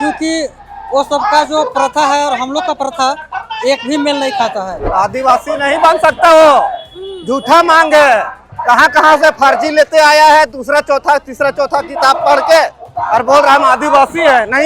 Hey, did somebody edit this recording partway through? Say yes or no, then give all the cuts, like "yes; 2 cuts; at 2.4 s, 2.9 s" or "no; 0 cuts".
yes; 1 cut; at 4.8 s